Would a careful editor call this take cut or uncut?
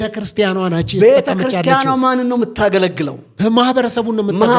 uncut